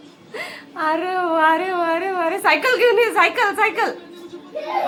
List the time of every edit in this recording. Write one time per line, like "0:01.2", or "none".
none